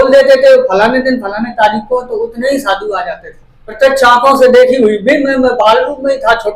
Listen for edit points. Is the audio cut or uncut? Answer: cut